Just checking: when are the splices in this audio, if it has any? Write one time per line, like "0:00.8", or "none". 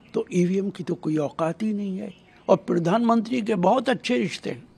none